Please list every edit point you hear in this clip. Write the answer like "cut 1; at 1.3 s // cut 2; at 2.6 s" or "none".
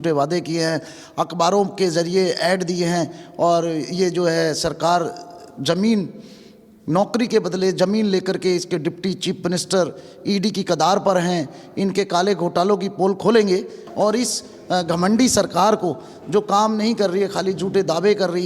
cut 1; at 13.8 s

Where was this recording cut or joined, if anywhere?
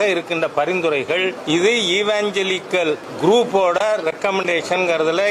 cut 1; at 1.4 s // cut 2; at 3.1 s

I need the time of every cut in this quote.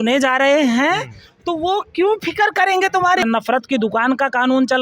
cut 1; at 3.2 s

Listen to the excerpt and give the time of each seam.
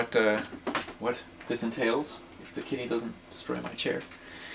none

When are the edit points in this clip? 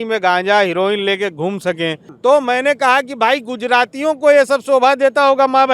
cut 1; at 2.1 s

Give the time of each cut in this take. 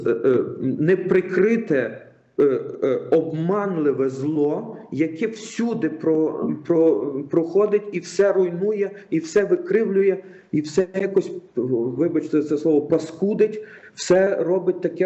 none

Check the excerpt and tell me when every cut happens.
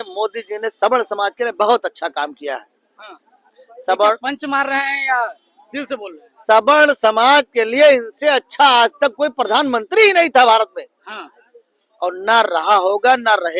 none

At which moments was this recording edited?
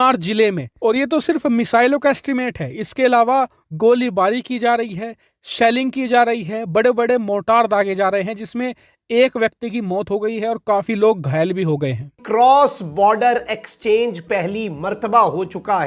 cut 1; at 12.1 s

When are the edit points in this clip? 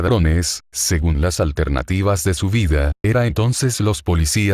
cut 1; at 3.6 s

